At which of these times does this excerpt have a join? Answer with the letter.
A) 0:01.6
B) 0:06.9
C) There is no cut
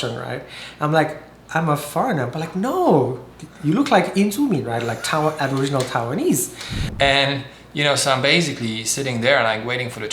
B